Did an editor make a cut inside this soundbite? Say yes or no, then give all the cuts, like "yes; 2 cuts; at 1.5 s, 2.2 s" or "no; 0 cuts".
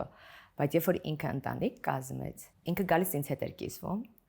no; 0 cuts